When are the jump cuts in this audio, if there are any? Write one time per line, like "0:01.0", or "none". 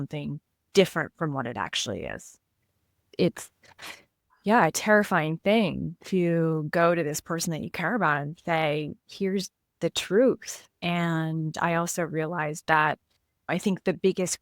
0:03.0
0:13.5